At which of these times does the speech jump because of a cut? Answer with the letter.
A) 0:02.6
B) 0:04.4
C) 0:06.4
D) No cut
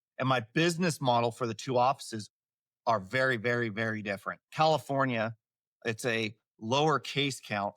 B